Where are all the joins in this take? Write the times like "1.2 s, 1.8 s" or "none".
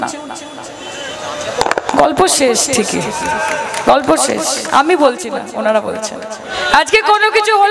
6.5 s